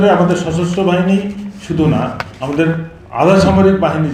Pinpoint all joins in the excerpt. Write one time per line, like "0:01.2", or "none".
none